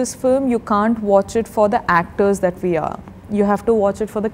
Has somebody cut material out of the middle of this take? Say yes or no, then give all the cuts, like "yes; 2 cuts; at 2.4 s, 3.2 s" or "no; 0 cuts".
no; 0 cuts